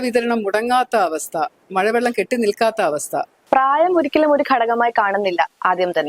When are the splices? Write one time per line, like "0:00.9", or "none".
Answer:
0:03.3